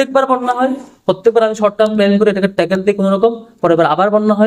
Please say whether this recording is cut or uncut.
uncut